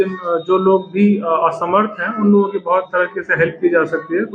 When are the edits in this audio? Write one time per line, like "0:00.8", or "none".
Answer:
none